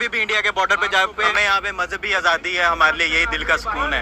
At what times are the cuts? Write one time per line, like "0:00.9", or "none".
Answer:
0:01.3